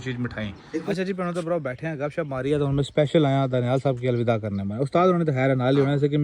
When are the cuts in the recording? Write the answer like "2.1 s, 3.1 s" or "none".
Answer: 0.9 s